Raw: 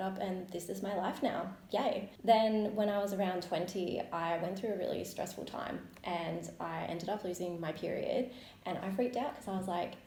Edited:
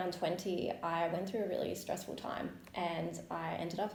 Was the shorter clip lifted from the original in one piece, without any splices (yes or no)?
yes